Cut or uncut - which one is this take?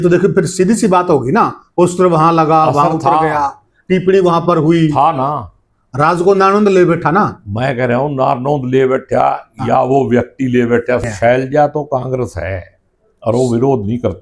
cut